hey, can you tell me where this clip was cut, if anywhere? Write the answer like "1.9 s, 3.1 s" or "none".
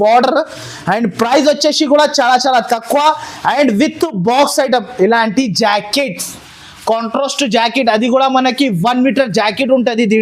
none